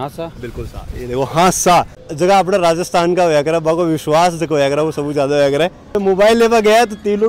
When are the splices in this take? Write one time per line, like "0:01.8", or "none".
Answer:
0:02.0
0:05.9